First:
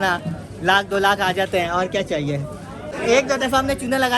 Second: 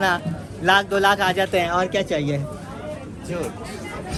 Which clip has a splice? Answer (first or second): first